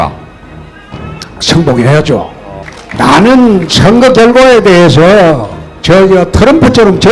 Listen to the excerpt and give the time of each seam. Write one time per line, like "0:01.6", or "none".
none

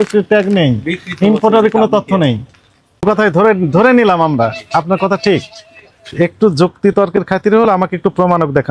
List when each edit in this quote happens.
0:03.0

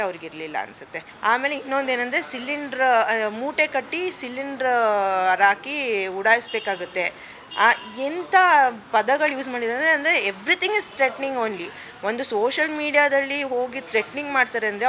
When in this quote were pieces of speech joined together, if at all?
0:01.0

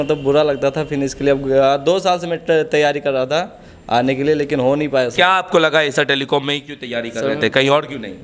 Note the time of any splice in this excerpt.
none

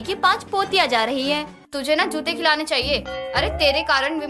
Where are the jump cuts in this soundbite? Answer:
0:01.6

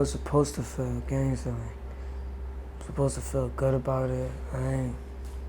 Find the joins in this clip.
none

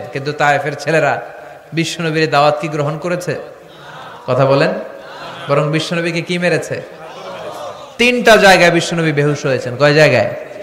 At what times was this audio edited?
none

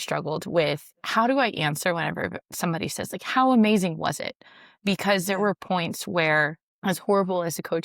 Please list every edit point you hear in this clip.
0:06.6

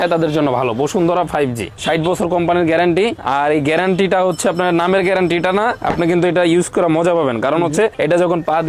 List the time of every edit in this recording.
none

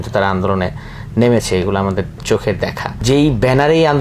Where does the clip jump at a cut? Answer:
0:02.9

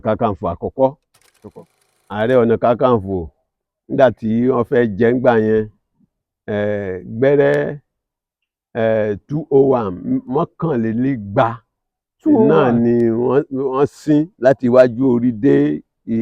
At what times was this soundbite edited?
0:01.4

